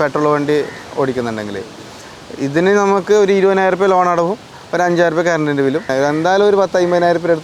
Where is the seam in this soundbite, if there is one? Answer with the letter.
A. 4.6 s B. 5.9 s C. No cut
B